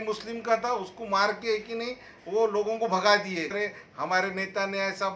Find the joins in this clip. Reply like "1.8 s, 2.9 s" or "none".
3.5 s